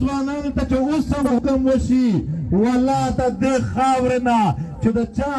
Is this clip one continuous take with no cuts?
no; 1 cut; at 1.4 s

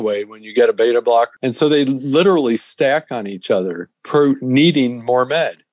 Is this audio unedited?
no; 2 cuts; at 1.3 s, 4.0 s

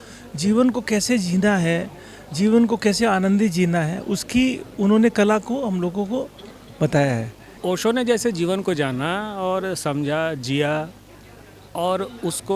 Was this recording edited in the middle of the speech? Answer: yes; 1 cut; at 7.6 s

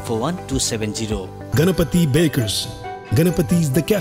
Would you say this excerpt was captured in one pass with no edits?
no; 1 cut; at 1.4 s

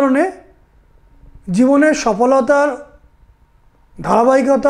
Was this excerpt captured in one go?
yes; 0 cuts

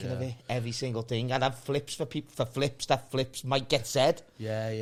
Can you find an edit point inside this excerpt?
no; 0 cuts

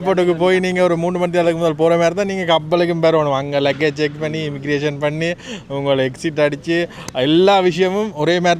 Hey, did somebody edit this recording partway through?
no; 0 cuts

